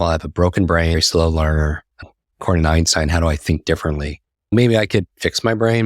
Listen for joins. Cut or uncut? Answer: cut